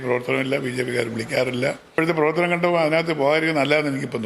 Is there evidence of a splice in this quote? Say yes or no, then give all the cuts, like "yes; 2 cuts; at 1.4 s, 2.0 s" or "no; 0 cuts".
yes; 1 cut; at 1.9 s